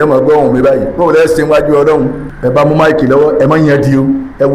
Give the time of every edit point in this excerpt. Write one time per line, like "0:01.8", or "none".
0:02.2